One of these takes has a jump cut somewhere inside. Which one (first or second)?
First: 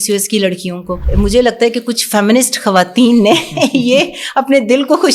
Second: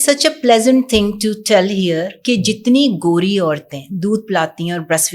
first